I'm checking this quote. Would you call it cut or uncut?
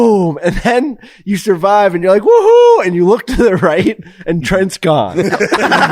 uncut